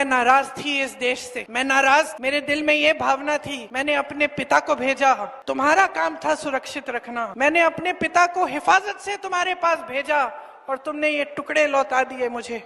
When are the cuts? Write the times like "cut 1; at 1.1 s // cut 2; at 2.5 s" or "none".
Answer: cut 1; at 1.4 s // cut 2; at 2.1 s // cut 3; at 3.6 s // cut 4; at 5.3 s // cut 5; at 7.3 s